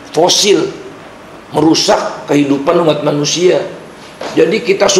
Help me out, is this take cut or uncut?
uncut